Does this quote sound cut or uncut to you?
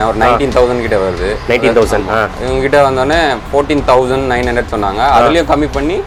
uncut